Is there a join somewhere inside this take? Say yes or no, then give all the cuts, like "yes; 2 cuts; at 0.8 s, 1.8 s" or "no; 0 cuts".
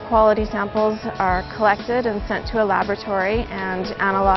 no; 0 cuts